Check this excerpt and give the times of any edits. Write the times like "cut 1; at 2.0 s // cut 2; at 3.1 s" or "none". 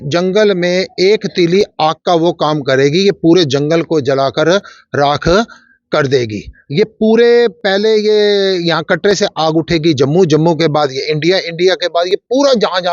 none

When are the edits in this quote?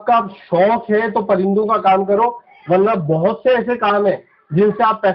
none

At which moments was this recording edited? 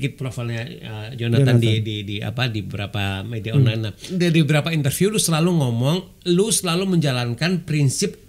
cut 1; at 4.0 s

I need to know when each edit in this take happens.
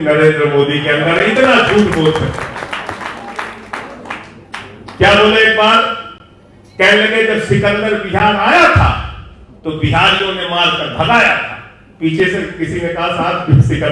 none

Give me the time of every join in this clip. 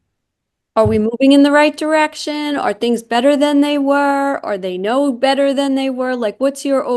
none

